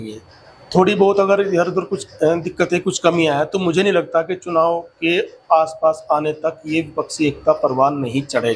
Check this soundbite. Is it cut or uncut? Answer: uncut